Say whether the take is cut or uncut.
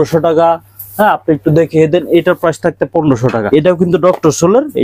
cut